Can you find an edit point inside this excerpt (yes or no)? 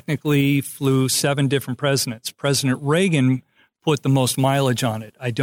no